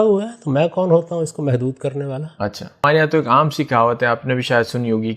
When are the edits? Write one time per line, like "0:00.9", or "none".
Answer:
0:02.8